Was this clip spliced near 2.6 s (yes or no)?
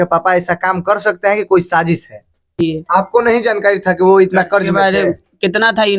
yes